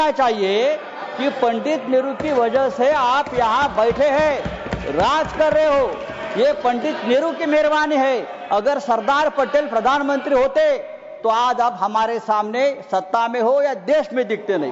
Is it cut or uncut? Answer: uncut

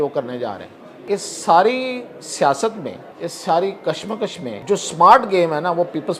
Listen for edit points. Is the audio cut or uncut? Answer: cut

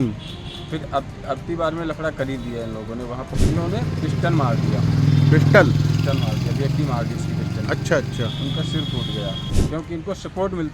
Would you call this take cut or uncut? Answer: cut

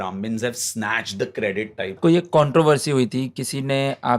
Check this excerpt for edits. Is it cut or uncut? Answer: cut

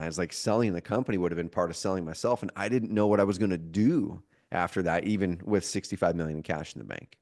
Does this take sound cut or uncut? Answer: uncut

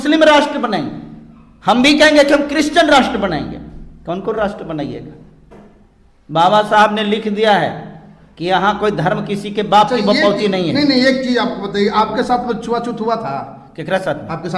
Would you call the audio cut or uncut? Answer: uncut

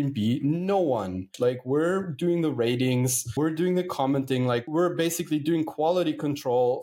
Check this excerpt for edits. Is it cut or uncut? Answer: cut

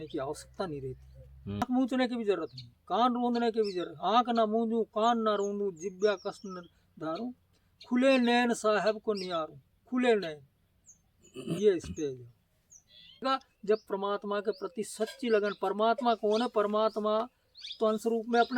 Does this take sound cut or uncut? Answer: cut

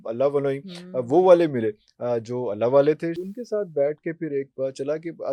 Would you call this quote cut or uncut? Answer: cut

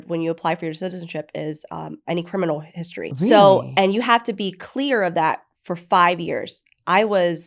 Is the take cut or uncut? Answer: cut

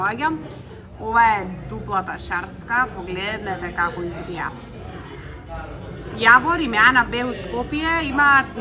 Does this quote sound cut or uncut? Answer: uncut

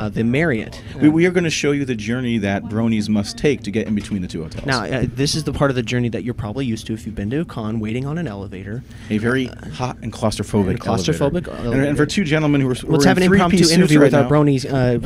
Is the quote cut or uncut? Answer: cut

